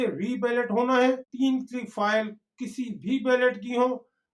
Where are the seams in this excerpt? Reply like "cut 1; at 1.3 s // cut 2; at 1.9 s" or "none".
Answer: cut 1; at 1.3 s